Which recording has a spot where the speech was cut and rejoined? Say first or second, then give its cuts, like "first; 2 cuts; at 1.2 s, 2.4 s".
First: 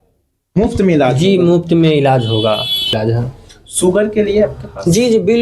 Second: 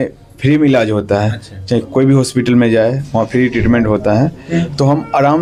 first; 1 cut; at 2.9 s